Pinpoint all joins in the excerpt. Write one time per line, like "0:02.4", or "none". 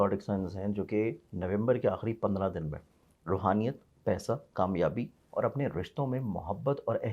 none

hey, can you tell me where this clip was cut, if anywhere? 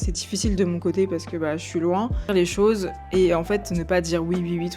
0:02.3

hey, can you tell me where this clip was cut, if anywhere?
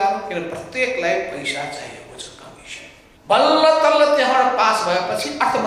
0:03.0

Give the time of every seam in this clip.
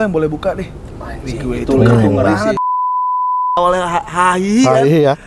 0:03.1

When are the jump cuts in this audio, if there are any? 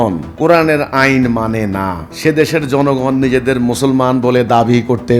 none

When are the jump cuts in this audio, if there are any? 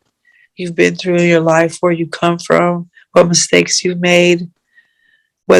none

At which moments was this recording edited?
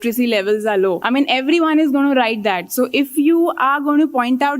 0:01.0

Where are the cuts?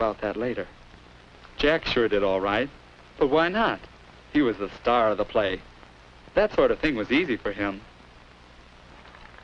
none

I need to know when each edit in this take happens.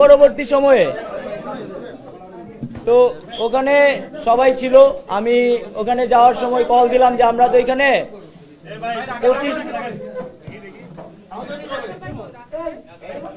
none

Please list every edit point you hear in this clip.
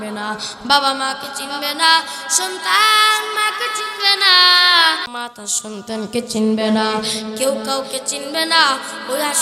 0:05.1

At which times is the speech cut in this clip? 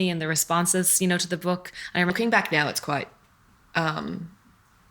0:02.1

